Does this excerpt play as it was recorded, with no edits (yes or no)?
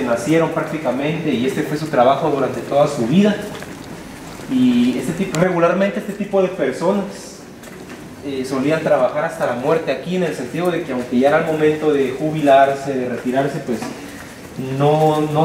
yes